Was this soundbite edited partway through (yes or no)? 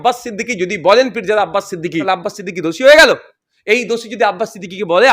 yes